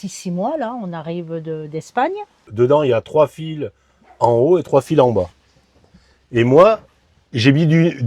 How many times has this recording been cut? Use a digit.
1